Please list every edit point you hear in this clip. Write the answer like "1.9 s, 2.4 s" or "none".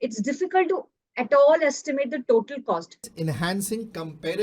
3.1 s